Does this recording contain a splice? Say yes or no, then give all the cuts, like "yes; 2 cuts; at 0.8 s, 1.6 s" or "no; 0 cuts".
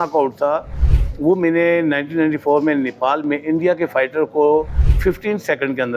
no; 0 cuts